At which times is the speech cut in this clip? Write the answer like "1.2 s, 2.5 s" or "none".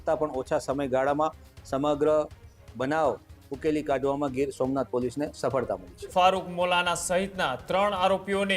5.9 s